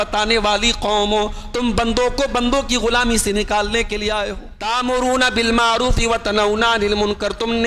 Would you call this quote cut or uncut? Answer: cut